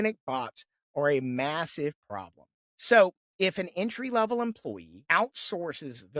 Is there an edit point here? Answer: no; 0 cuts

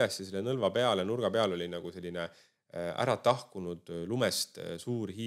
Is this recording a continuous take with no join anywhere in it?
yes; 0 cuts

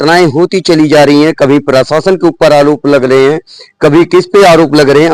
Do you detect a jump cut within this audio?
no; 0 cuts

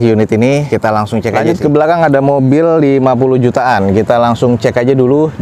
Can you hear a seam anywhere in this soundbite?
yes; 1 cut; at 1.3 s

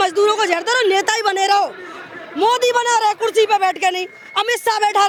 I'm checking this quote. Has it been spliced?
no; 0 cuts

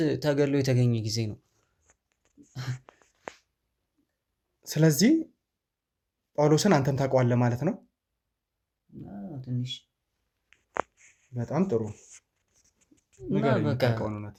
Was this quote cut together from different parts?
no; 0 cuts

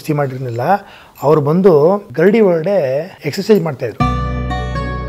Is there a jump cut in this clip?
yes; 3 cuts; at 2.1 s, 3.2 s, 4.0 s

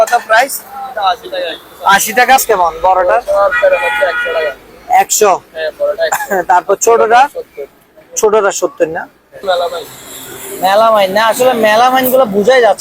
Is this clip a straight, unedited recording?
no; 2 cuts; at 2.4 s, 9.4 s

